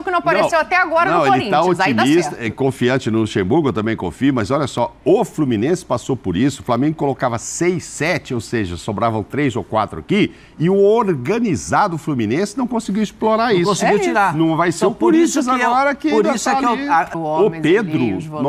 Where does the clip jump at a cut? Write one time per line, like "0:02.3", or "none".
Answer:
0:17.1